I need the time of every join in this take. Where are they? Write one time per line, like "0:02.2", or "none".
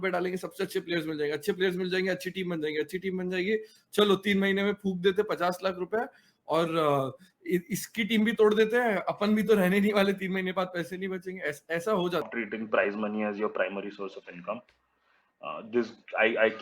0:12.3